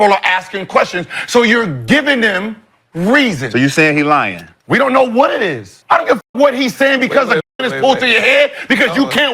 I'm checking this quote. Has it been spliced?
yes; 1 cut; at 6.1 s

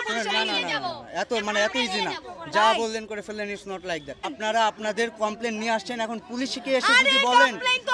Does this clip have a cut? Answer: yes; 1 cut; at 4.3 s

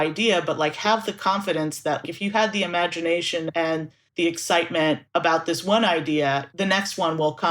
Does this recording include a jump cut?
yes; 4 cuts; at 2.0 s, 3.6 s, 5.0 s, 6.5 s

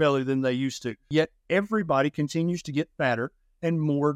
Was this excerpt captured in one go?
no; 1 cut; at 1.1 s

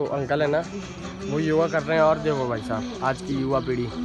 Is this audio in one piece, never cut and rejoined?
yes; 0 cuts

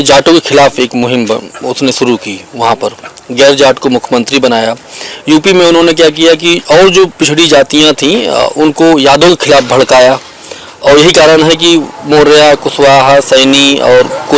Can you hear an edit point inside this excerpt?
no; 0 cuts

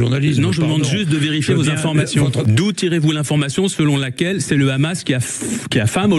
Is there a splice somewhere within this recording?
yes; 1 cut; at 2.5 s

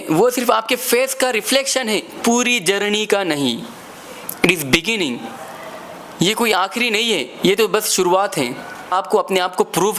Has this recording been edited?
yes; 2 cuts; at 3.9 s, 8.9 s

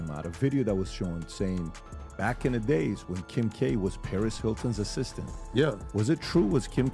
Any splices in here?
no; 0 cuts

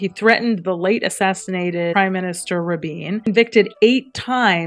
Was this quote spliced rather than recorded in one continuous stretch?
yes; 2 cuts; at 1.9 s, 3.3 s

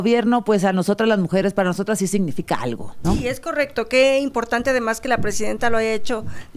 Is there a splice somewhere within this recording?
yes; 1 cut; at 2.9 s

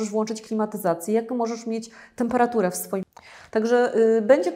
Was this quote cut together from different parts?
yes; 1 cut; at 3.0 s

